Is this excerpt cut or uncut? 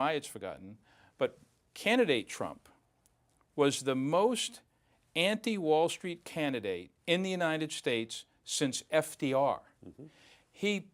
uncut